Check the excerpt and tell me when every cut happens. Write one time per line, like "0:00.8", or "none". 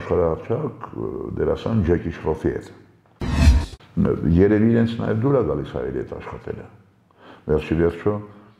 0:03.4